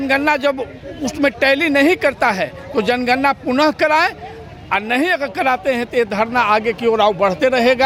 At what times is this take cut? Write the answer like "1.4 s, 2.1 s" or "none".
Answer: none